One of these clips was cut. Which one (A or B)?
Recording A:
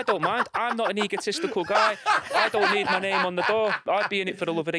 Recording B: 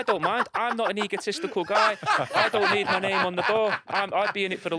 A